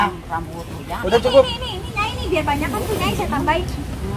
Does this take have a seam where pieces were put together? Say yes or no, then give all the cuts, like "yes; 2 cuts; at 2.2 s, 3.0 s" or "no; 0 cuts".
no; 0 cuts